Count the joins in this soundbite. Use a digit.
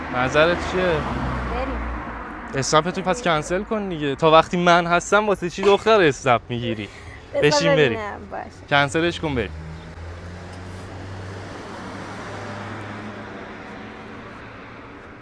0